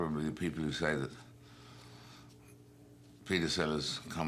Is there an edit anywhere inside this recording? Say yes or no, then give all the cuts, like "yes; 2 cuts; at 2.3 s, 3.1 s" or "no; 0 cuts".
no; 0 cuts